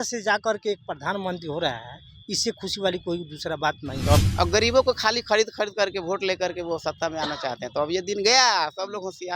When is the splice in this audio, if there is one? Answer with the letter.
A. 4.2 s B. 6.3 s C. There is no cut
A